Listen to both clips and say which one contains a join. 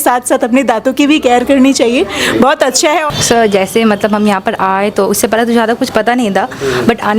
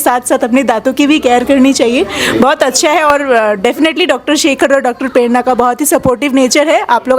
first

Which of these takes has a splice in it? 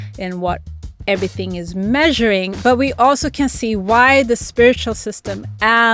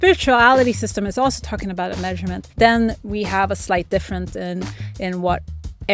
second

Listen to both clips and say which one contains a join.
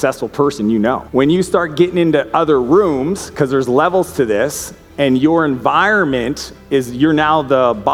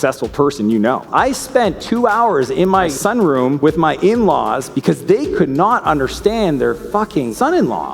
second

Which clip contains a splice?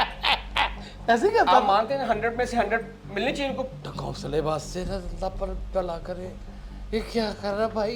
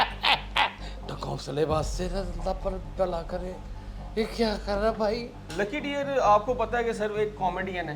second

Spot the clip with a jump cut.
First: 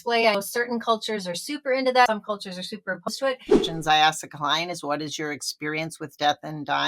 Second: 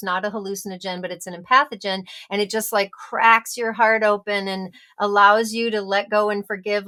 first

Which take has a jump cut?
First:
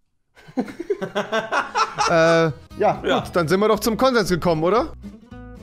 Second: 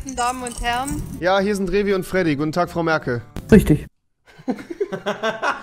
first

